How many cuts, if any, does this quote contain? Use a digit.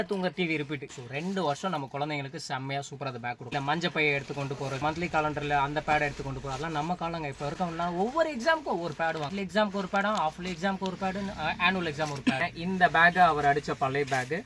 5